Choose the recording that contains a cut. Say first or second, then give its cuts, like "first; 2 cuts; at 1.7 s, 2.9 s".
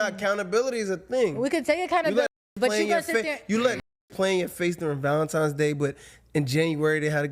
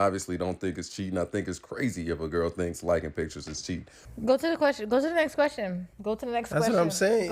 second; 1 cut; at 4.0 s